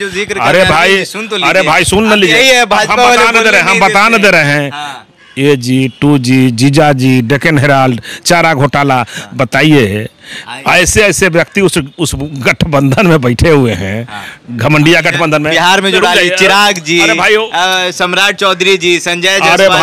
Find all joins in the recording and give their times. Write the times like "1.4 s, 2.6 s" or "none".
none